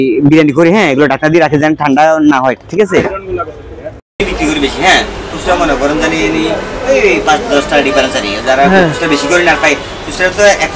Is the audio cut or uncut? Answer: cut